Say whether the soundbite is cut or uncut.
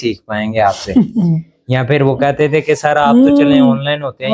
uncut